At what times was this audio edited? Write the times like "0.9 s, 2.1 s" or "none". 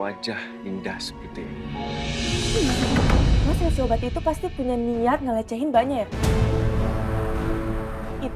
none